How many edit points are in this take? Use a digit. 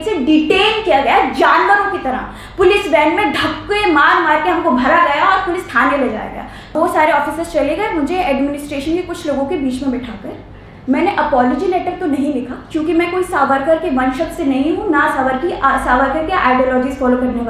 1